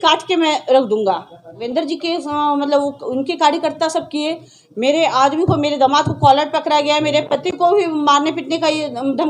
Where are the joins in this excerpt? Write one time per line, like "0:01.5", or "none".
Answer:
0:01.6

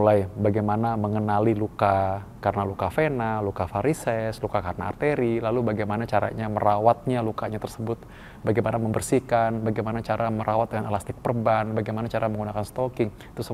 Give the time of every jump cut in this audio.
none

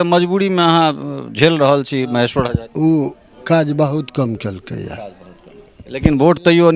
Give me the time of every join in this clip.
0:02.6

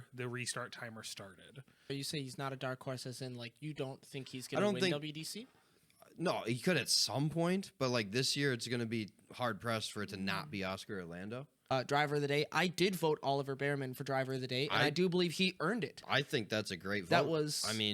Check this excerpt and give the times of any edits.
0:01.9
0:11.5

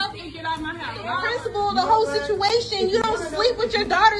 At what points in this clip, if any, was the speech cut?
0:01.2

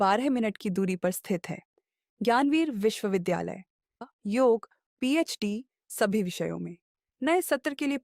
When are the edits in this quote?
0:04.0

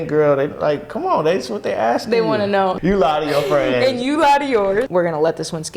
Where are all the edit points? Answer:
0:02.8
0:04.9

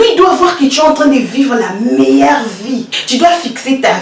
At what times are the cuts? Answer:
0:03.0

